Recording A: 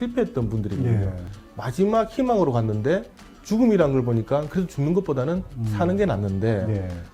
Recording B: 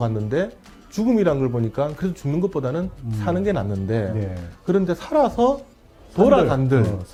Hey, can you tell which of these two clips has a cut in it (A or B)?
A